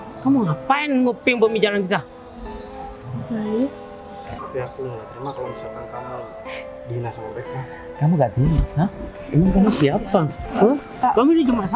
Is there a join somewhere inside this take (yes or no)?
yes